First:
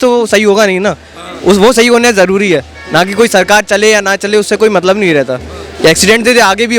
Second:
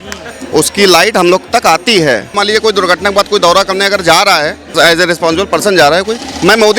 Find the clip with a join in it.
second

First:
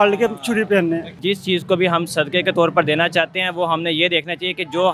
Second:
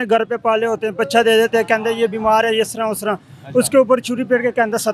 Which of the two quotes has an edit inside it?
first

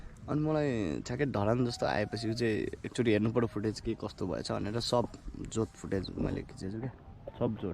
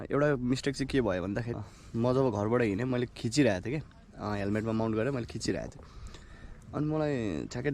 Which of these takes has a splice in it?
second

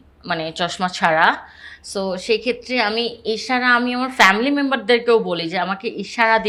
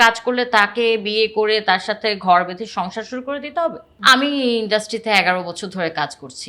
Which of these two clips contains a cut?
second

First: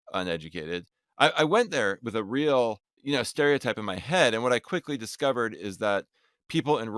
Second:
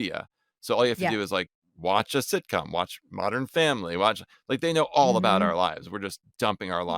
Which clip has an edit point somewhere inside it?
first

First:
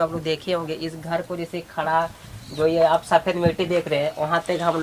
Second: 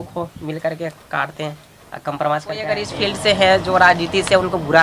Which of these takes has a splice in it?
second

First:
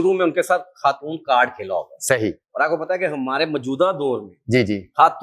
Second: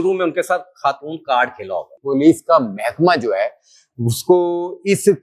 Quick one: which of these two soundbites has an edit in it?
second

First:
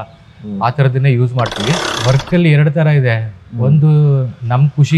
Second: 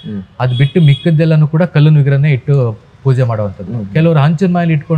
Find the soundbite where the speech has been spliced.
first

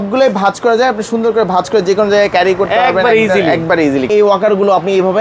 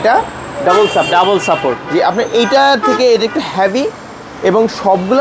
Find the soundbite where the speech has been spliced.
first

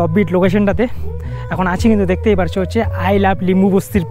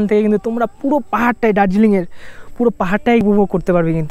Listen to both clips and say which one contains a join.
second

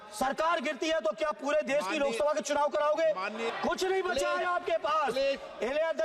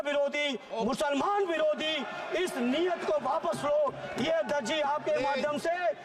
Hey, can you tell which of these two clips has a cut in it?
first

